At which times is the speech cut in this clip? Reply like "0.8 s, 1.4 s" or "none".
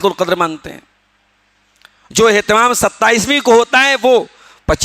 none